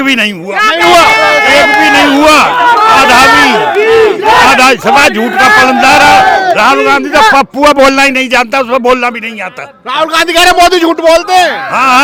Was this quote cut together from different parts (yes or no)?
no